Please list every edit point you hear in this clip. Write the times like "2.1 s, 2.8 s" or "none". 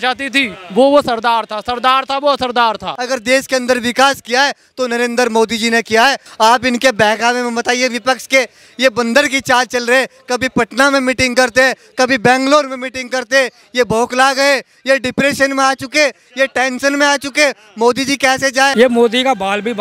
2.9 s, 6.2 s, 18.7 s

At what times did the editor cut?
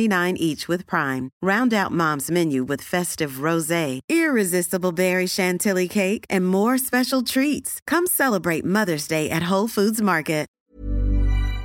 10.5 s

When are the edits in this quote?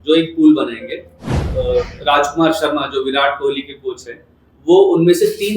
1.4 s

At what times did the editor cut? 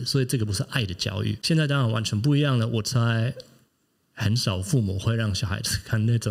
1.4 s

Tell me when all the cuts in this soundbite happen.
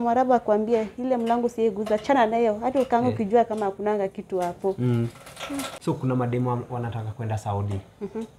none

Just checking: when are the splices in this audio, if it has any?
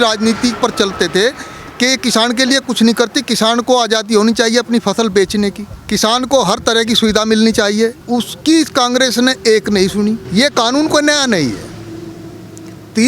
5.7 s, 8.0 s, 10.2 s

